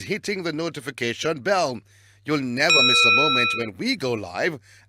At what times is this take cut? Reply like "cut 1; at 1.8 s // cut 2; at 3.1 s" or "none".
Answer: none